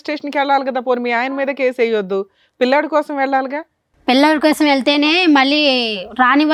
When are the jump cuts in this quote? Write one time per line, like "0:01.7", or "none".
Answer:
none